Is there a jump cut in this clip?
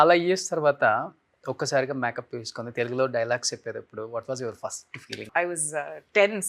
yes; 1 cut; at 5.3 s

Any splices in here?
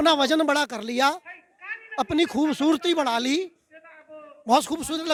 no; 0 cuts

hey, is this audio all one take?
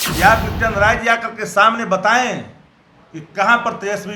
yes; 0 cuts

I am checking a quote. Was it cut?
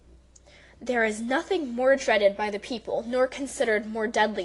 yes; 1 cut; at 2.6 s

